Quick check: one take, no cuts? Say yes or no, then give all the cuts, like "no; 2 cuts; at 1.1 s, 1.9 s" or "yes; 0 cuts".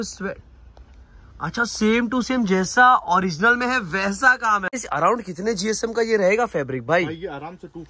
no; 1 cut; at 4.8 s